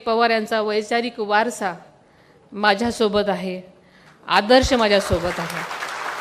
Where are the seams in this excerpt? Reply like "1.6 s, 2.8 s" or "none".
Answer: none